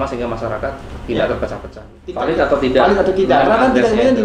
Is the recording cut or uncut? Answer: cut